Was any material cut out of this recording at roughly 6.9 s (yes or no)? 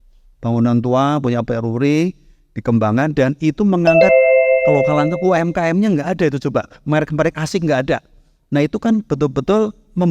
no